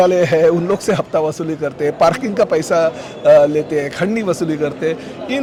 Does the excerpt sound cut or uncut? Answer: uncut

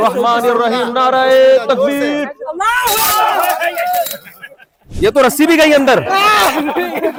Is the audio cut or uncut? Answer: uncut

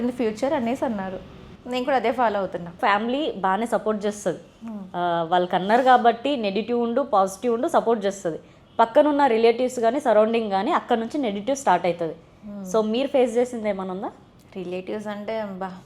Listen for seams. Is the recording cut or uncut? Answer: cut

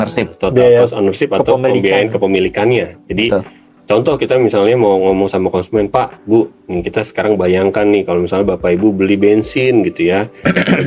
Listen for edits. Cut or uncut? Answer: uncut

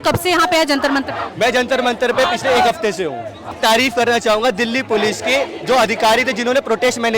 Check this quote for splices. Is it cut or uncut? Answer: cut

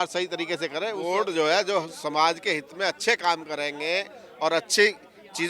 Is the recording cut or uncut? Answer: cut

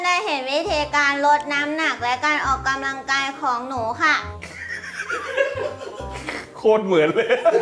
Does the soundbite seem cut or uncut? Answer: uncut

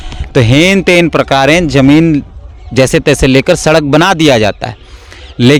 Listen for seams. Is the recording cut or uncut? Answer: uncut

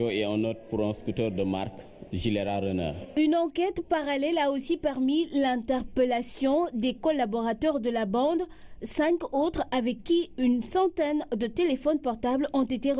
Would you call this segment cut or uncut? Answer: uncut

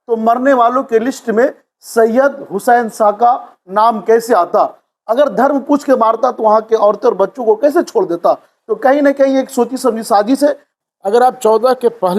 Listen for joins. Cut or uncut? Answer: cut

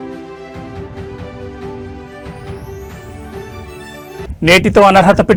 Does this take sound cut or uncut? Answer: uncut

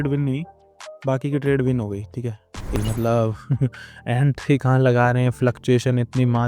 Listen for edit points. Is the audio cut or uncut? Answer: cut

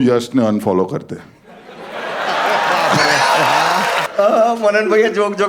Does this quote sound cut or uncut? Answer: cut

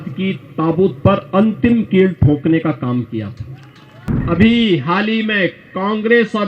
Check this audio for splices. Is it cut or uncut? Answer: cut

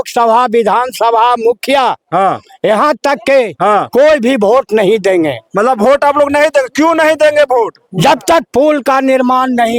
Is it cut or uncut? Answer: uncut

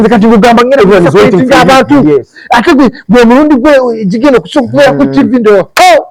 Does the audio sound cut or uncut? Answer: uncut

